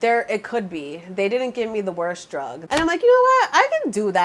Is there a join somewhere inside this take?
yes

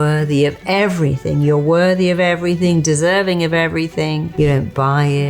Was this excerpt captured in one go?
no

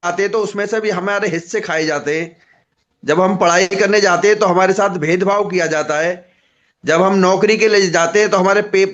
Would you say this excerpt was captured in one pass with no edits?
yes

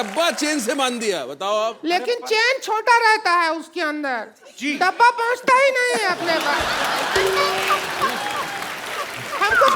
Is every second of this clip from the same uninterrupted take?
yes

